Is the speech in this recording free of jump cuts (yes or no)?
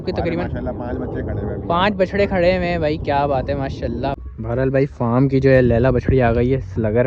no